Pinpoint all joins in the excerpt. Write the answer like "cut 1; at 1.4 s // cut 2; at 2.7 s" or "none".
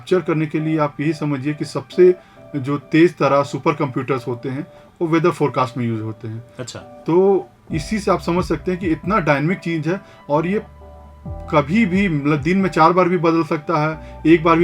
none

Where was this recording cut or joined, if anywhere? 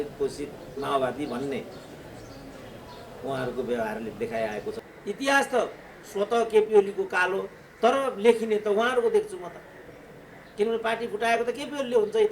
cut 1; at 4.8 s

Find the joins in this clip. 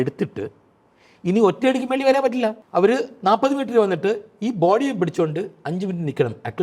cut 1; at 2.6 s

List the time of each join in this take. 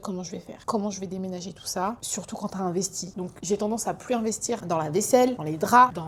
none

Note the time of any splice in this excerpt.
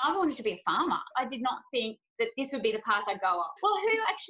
cut 1; at 1.1 s // cut 2; at 3.5 s

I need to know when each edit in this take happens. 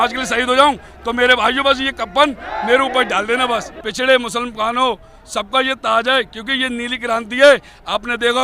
cut 1; at 3.8 s

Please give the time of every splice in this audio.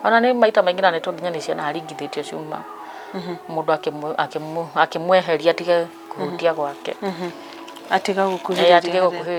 none

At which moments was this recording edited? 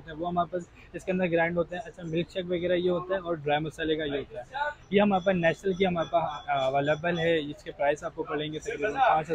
none

